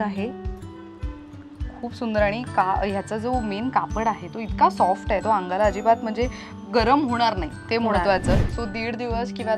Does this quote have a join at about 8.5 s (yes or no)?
yes